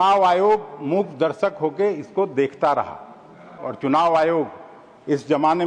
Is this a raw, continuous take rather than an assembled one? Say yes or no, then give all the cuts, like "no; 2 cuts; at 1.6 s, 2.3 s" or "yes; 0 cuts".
no; 1 cut; at 3.6 s